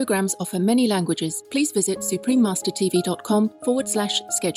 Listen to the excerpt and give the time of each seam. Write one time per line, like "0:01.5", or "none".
0:01.4
0:03.6